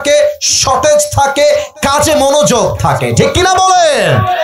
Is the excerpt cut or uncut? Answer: uncut